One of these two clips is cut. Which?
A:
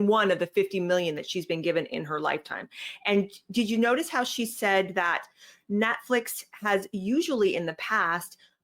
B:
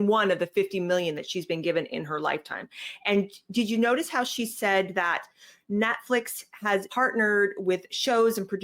B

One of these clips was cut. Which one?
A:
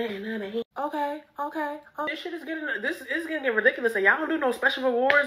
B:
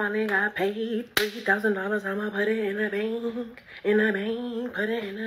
A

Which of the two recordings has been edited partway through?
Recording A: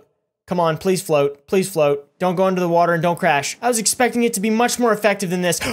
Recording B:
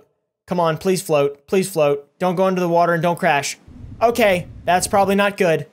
A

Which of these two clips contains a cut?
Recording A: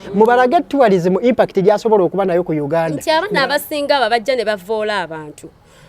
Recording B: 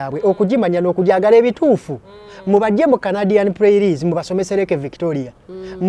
A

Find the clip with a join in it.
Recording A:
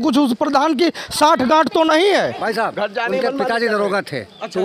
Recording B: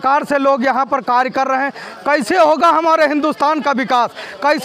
A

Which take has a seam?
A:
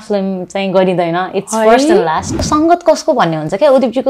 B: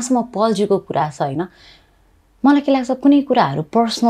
A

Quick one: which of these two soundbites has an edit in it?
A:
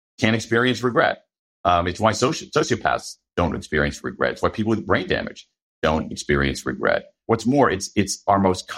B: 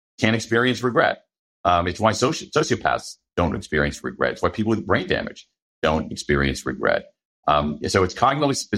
A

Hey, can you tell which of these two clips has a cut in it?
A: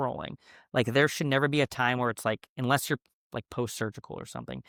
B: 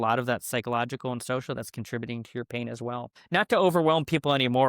B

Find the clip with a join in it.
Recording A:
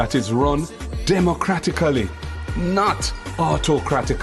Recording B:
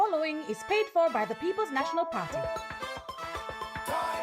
B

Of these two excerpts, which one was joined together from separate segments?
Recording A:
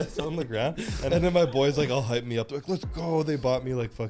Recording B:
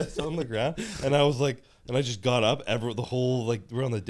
A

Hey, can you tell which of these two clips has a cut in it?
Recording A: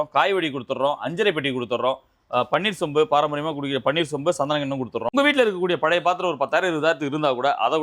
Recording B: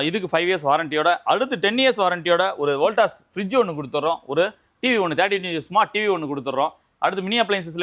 A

